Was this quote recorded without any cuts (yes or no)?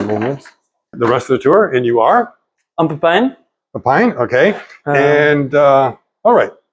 no